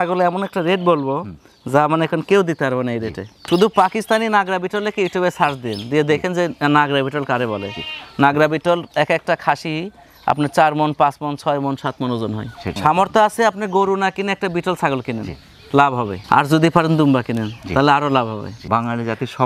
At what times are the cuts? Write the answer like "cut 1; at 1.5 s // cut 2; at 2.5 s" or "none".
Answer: cut 1; at 3.5 s // cut 2; at 12.7 s // cut 3; at 18.5 s